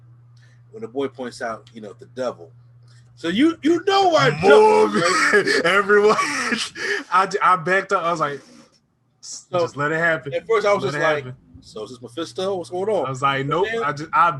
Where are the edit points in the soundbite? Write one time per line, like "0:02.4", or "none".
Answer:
0:02.6